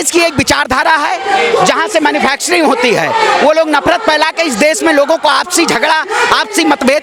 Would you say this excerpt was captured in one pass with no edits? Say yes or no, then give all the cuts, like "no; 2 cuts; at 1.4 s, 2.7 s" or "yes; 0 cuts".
yes; 0 cuts